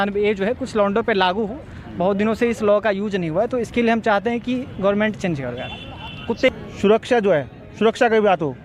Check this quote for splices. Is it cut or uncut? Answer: cut